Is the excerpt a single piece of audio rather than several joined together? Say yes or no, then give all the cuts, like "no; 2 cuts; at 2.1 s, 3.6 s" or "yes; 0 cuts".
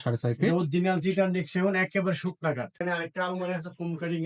no; 1 cut; at 2.8 s